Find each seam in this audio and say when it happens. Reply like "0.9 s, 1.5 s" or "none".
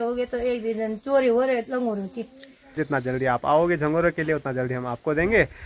2.8 s